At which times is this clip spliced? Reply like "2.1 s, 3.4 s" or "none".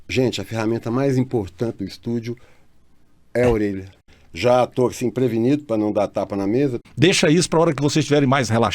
3.9 s, 6.8 s